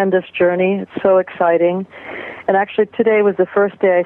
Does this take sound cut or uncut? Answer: cut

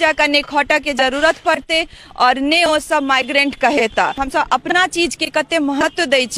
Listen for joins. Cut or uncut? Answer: cut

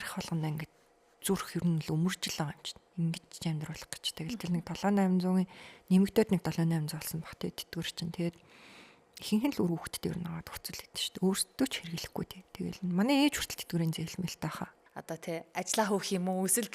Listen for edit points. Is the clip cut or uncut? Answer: cut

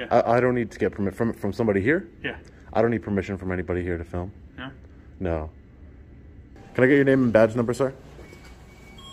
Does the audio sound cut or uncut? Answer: cut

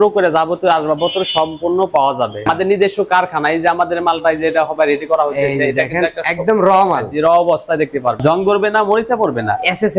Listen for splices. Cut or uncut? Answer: cut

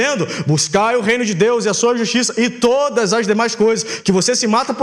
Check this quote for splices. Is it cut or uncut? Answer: uncut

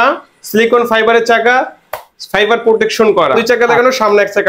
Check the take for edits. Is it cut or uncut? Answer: cut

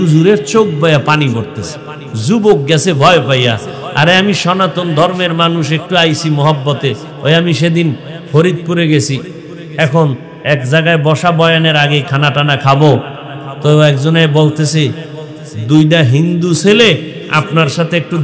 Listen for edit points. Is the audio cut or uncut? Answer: uncut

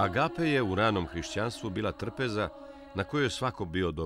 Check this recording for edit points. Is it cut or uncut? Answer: uncut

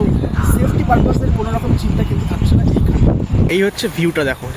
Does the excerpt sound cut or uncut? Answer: uncut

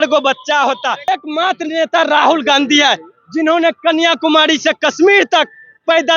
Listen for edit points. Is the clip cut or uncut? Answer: cut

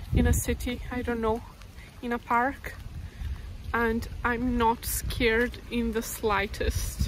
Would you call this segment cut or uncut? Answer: uncut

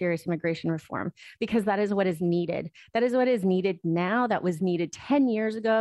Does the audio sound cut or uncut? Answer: uncut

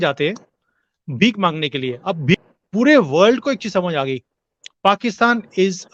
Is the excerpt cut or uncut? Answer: cut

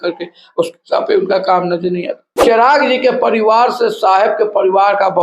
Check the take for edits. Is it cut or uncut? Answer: cut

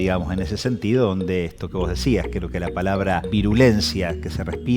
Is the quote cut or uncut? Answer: cut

